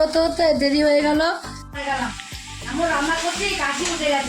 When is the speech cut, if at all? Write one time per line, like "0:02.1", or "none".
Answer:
0:01.6

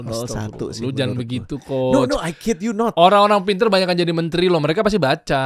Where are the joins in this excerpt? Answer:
none

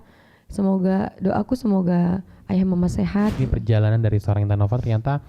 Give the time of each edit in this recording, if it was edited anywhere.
0:03.4

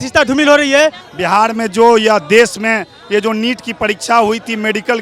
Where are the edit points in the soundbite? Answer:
0:01.1

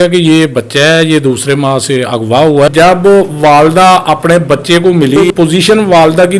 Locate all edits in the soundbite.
0:02.7
0:05.2

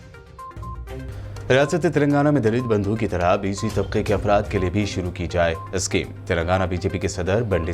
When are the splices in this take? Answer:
0:01.1

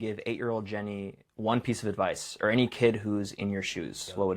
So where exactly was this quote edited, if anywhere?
none

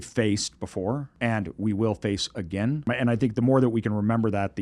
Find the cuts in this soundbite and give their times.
0:01.1
0:02.9

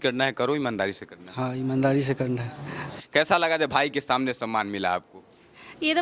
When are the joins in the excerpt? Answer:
0:02.9

